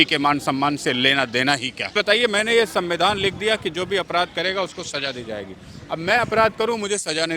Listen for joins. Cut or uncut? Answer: cut